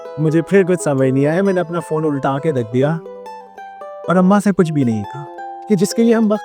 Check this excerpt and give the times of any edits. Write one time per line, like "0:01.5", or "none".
0:05.5